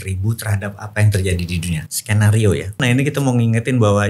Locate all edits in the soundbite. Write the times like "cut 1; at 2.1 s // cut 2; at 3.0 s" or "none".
cut 1; at 2.8 s